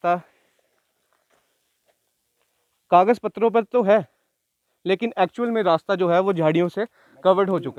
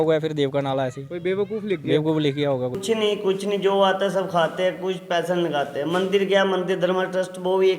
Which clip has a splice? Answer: second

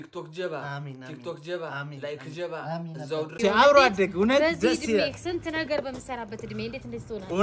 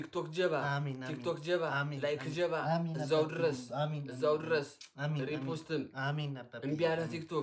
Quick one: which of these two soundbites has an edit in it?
first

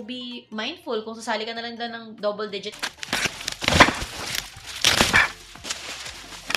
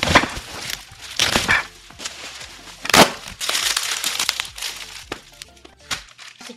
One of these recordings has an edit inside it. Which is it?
first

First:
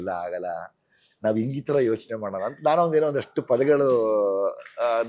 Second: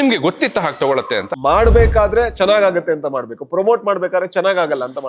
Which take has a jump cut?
second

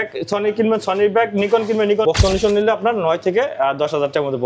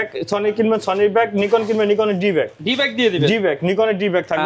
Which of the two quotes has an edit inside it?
first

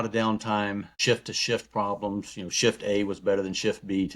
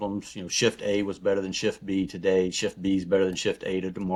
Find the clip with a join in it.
first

